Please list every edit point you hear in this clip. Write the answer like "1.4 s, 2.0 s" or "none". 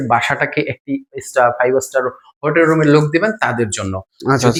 none